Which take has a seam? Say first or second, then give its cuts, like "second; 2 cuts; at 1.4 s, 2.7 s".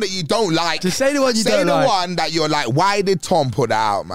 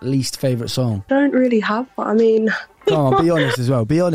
second; 2 cuts; at 1.1 s, 2.8 s